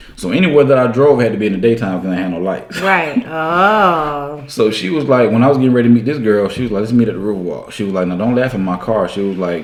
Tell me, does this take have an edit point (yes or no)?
no